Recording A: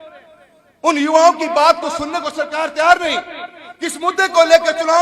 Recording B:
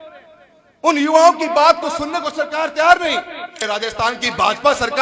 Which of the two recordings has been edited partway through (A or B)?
B